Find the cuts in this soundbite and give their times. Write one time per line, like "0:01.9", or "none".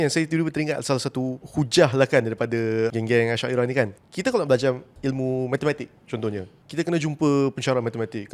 0:01.4
0:02.9
0:04.0
0:06.6